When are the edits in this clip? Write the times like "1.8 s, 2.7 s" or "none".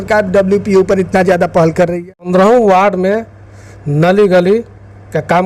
2.3 s